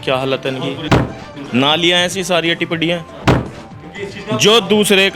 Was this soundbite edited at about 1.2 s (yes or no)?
yes